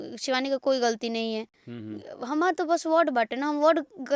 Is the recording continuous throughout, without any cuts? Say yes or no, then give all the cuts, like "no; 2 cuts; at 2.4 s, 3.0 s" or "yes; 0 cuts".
yes; 0 cuts